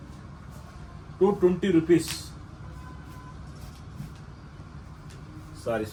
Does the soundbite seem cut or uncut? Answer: uncut